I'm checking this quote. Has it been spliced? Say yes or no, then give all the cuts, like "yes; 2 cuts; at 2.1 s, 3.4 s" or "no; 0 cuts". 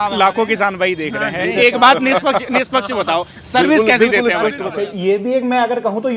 yes; 1 cut; at 4.6 s